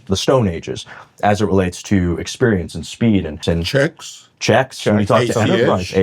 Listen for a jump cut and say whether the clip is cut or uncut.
cut